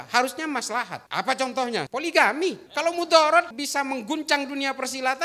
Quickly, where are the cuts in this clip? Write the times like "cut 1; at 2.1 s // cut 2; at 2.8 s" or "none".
cut 1; at 1.0 s // cut 2; at 1.9 s // cut 3; at 2.6 s // cut 4; at 3.6 s